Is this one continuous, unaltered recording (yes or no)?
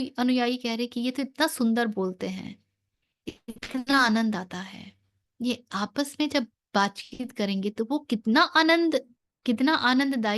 no